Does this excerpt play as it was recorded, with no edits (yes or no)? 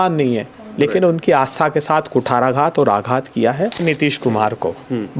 no